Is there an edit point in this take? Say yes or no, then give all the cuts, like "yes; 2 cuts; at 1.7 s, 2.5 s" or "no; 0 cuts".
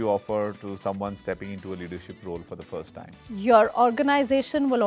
no; 0 cuts